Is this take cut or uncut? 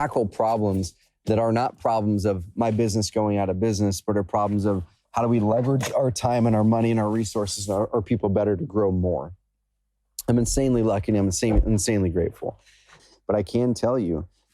cut